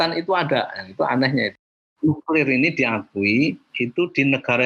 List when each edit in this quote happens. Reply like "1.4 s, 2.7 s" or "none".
1.8 s